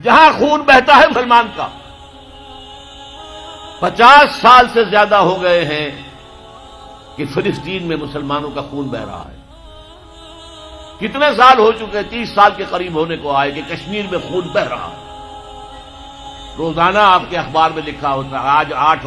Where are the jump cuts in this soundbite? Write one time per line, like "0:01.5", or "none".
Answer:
0:01.1